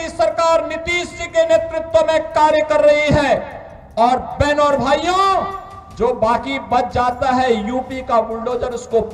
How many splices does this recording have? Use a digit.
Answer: 0